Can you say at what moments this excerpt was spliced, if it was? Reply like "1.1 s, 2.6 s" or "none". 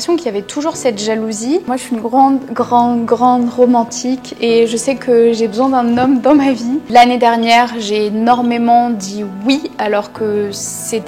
1.7 s, 6.9 s